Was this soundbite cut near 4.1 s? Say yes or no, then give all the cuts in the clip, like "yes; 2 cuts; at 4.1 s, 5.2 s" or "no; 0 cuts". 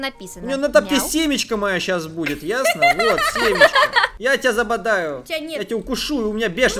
yes; 1 cut; at 4.1 s